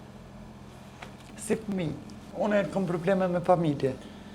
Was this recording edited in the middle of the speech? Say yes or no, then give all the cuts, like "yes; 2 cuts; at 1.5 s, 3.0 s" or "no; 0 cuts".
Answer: yes; 1 cut; at 2.2 s